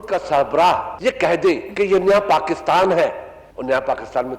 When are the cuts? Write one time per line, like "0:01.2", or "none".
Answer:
0:00.9
0:01.7

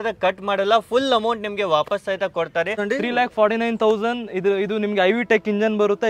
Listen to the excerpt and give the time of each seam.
0:02.8

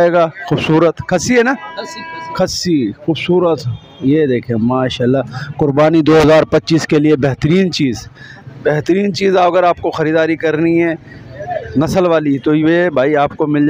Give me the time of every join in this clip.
none

